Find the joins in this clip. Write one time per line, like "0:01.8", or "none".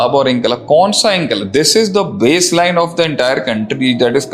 none